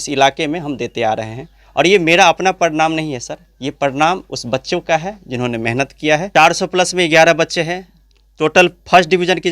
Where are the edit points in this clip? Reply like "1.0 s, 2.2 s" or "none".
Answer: 6.3 s